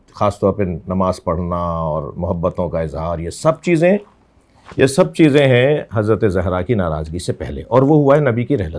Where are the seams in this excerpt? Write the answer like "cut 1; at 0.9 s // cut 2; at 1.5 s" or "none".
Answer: none